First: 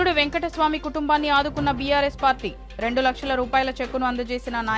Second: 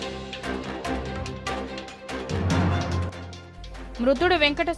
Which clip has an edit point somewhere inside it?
second; 1 cut; at 1.0 s

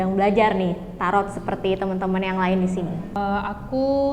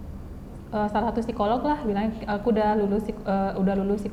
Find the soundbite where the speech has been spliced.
first; 1 cut; at 3.2 s

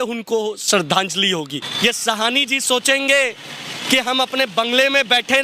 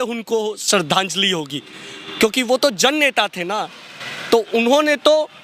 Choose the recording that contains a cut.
first; 1 cut; at 1.6 s

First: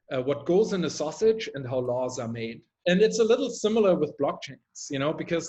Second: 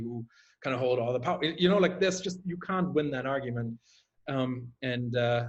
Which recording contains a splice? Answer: first; 1 cut; at 2.7 s

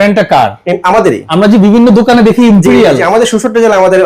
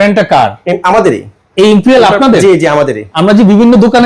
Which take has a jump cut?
first; 1 cut; at 1.2 s

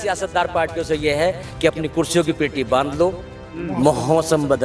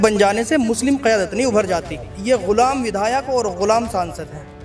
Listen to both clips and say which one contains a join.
second; 1 cut; at 2.2 s

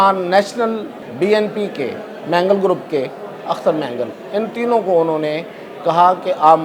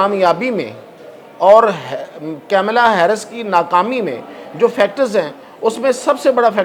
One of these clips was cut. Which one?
first; 1 cut; at 1.0 s

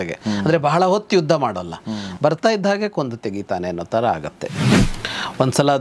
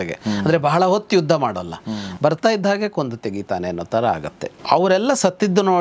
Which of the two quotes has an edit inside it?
first; 1 cut; at 4.6 s

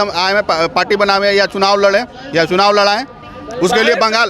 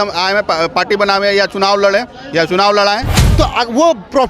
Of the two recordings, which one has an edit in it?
second; 1 cut; at 3.2 s

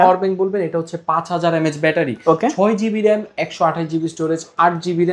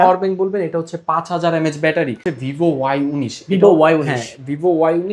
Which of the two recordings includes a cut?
second; 1 cut; at 2.2 s

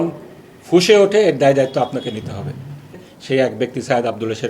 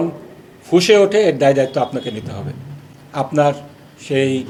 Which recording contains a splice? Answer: first; 1 cut; at 3.0 s

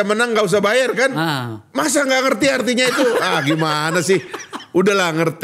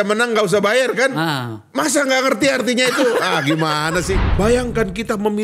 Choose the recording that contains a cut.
second; 1 cut; at 4.2 s

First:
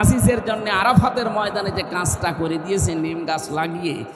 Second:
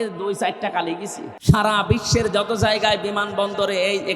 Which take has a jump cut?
second; 1 cut; at 1.2 s

